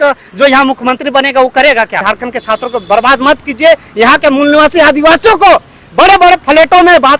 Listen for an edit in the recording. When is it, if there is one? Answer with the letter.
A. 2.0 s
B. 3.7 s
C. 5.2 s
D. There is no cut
A